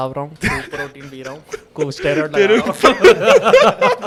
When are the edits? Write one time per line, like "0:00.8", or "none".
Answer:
none